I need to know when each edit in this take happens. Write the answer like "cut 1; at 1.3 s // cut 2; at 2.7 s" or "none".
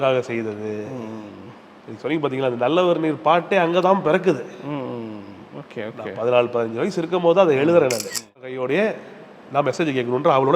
cut 1; at 8.5 s